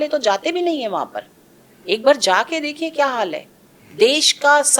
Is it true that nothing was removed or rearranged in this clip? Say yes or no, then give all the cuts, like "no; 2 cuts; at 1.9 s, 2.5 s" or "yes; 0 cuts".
yes; 0 cuts